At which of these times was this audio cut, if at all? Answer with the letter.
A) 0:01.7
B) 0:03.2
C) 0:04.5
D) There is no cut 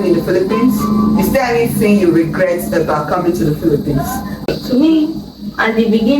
C